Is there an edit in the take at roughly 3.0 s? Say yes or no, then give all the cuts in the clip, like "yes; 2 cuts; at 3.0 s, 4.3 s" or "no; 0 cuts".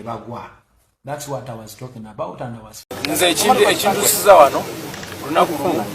yes; 1 cut; at 3.0 s